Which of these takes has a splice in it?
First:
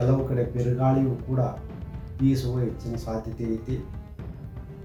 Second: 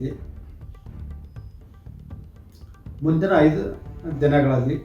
second; 2 cuts; at 0.8 s, 3.0 s

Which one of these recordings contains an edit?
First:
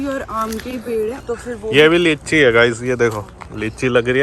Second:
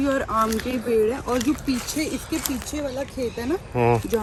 first; 1 cut; at 1.2 s

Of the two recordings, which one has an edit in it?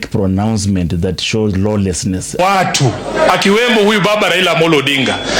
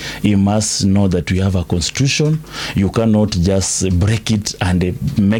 first; 1 cut; at 2.4 s

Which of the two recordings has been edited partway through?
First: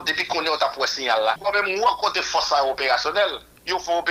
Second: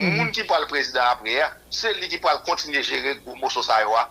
first; 1 cut; at 1.4 s

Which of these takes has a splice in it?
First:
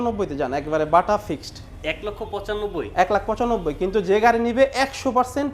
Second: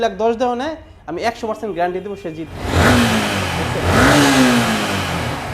second; 1 cut; at 2.5 s

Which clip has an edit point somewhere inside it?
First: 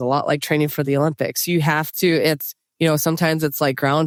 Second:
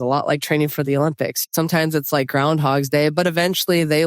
second; 1 cut; at 1.5 s

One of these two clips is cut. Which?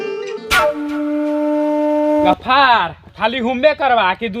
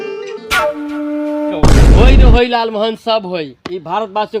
second; 1 cut; at 1.5 s

